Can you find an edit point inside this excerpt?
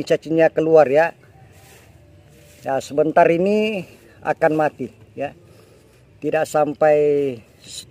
no; 0 cuts

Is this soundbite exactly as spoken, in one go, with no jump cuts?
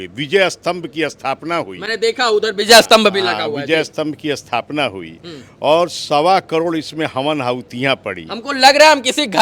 yes; 0 cuts

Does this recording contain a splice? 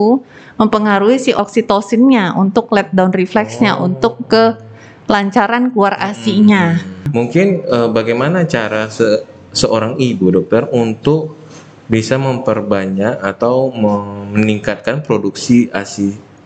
yes; 2 cuts; at 1.4 s, 7.1 s

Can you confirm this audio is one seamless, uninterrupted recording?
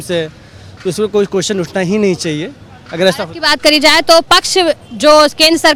yes; 0 cuts

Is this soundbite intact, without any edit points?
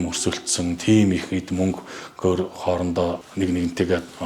no; 1 cut; at 3.2 s

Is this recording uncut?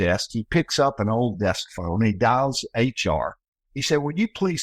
yes; 0 cuts

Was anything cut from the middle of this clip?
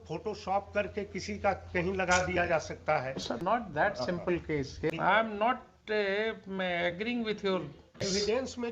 yes; 3 cuts; at 3.4 s, 4.9 s, 8.0 s

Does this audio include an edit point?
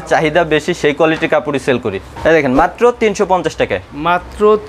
yes; 1 cut; at 2.1 s

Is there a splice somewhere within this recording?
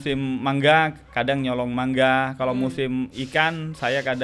no; 0 cuts

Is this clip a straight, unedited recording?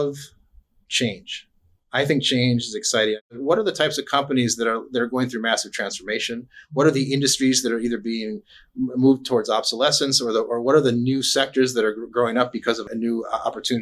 no; 2 cuts; at 3.2 s, 12.8 s

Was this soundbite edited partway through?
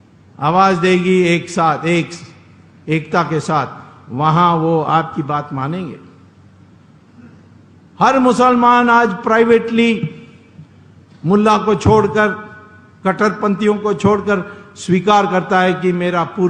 no; 0 cuts

